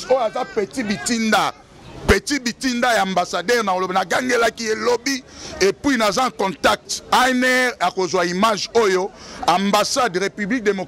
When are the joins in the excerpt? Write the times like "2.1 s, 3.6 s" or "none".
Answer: none